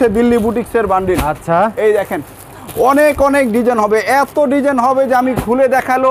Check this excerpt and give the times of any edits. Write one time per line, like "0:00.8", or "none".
none